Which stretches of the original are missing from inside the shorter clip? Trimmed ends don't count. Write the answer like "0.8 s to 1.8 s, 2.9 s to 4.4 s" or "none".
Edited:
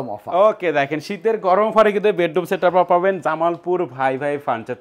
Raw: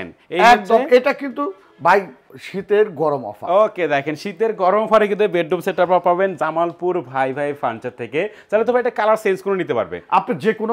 none